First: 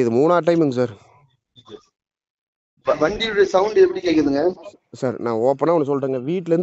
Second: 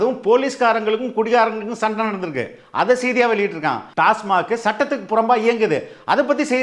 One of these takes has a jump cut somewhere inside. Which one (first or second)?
second